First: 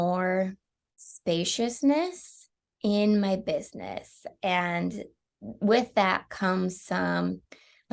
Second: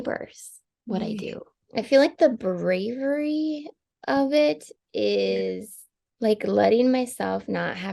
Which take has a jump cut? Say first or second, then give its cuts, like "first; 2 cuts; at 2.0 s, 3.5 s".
second; 1 cut; at 1.6 s